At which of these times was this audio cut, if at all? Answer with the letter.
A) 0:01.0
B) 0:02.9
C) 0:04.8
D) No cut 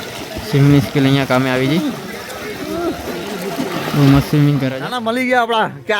C